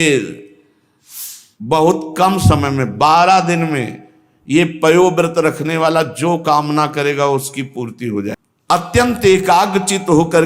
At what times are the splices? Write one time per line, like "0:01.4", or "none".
0:08.5